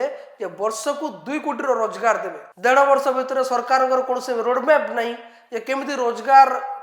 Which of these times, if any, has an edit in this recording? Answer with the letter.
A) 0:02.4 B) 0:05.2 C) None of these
A